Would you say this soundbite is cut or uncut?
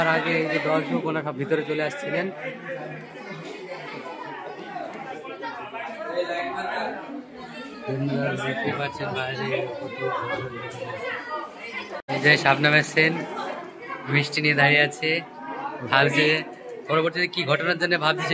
uncut